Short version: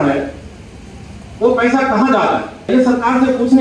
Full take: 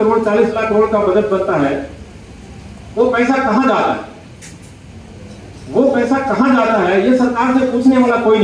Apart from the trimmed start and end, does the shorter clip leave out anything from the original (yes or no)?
yes